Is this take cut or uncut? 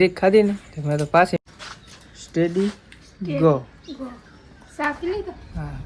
cut